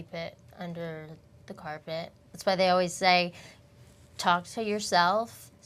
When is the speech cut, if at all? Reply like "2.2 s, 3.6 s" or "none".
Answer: 2.2 s